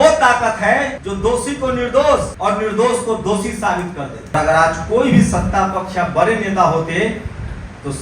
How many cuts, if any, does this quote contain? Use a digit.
3